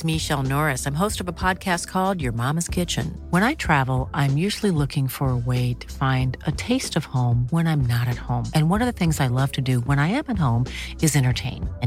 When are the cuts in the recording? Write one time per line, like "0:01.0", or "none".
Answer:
none